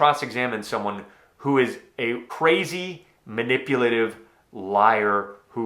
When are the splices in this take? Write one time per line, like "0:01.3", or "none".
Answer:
0:02.3